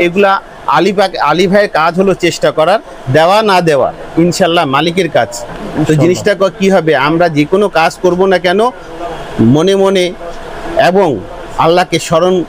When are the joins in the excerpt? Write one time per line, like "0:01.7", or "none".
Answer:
none